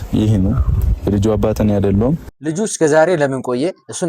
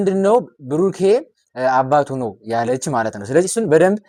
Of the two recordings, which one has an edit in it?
first; 1 cut; at 2.3 s

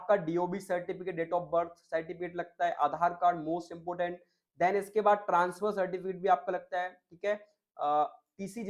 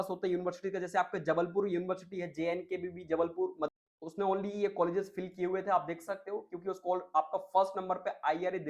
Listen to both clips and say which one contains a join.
second; 1 cut; at 3.8 s

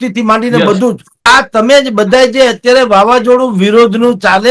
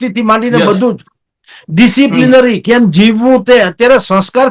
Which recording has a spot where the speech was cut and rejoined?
first; 1 cut; at 1.2 s

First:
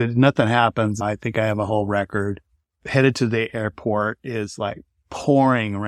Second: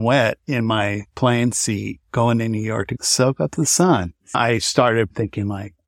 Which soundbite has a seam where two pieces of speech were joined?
second; 2 cuts; at 1.0 s, 4.4 s

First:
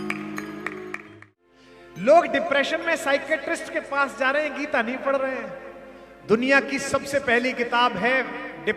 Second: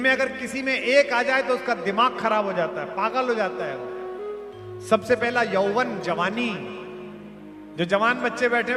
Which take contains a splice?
first; 1 cut; at 1.2 s

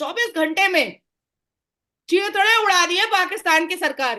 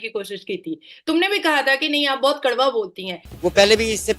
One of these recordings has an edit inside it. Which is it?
second; 1 cut; at 3.2 s

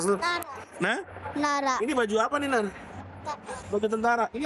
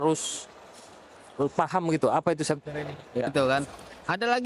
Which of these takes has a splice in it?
second; 1 cut; at 3.5 s

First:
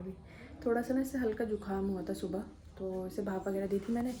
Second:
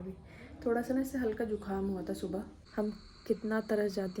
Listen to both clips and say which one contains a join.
second; 1 cut; at 2.6 s

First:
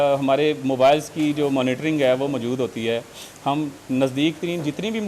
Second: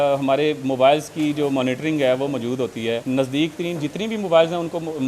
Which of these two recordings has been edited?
second; 1 cut; at 3.0 s

